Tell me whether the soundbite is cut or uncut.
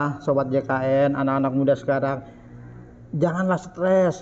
uncut